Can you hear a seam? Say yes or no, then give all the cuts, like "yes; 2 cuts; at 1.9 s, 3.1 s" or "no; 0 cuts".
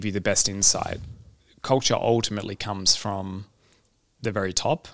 no; 0 cuts